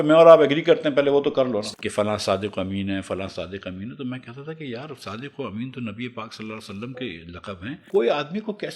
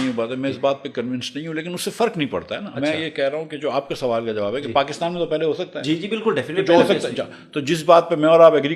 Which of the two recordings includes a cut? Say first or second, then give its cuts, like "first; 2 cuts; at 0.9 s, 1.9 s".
first; 2 cuts; at 1.7 s, 7.8 s